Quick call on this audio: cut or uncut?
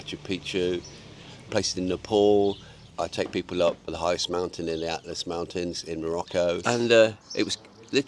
cut